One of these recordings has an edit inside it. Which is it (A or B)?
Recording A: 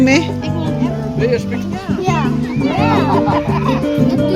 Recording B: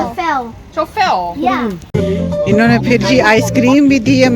B